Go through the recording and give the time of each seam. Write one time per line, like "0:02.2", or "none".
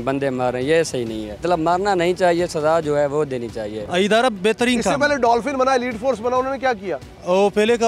0:01.4
0:03.8